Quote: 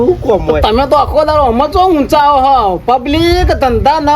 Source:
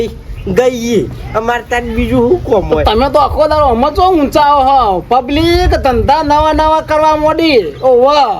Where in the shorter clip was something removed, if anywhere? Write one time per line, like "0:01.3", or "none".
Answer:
none